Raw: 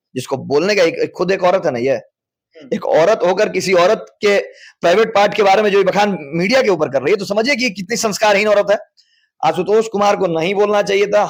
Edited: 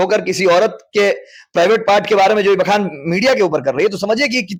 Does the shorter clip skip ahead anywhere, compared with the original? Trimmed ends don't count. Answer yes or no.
no